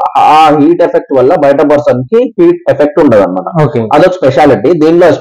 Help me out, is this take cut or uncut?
uncut